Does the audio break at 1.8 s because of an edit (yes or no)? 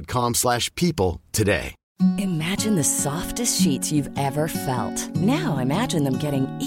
yes